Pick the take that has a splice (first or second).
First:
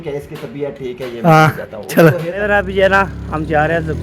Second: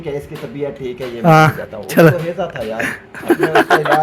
first